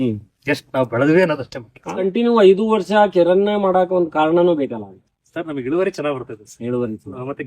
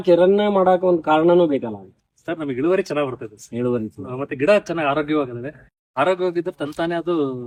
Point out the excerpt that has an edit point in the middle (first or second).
first